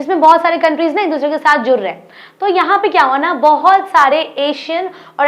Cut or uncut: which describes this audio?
uncut